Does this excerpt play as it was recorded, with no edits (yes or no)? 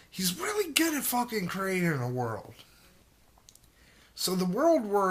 no